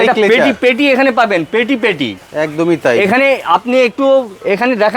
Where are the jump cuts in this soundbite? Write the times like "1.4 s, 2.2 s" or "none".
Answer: none